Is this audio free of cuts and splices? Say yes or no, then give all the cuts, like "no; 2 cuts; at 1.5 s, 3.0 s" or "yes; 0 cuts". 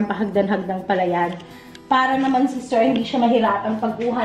yes; 0 cuts